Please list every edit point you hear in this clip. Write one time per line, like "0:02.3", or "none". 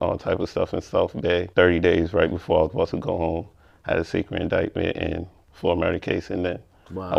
none